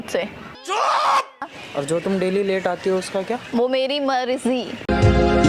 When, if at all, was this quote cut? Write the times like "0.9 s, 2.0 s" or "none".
1.6 s